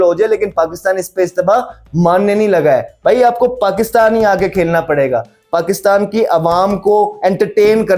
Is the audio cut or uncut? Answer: uncut